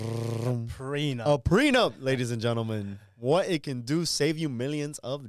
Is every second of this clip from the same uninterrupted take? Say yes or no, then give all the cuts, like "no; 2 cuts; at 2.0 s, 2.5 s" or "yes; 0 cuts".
yes; 0 cuts